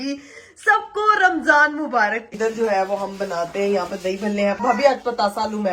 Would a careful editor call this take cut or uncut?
cut